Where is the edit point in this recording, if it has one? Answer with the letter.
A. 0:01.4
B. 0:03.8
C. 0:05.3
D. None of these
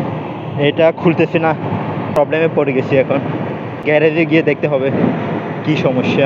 B